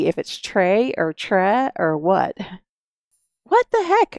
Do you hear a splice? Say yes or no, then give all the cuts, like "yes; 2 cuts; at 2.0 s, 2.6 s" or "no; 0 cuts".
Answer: no; 0 cuts